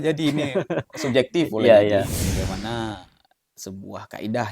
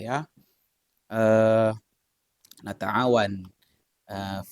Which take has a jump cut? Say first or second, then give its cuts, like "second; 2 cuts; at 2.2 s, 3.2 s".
first; 1 cut; at 2.2 s